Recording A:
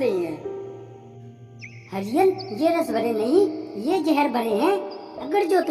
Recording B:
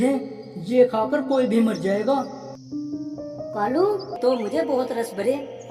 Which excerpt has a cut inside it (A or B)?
B